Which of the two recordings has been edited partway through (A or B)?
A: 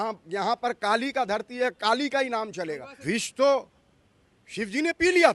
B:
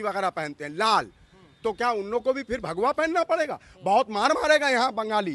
A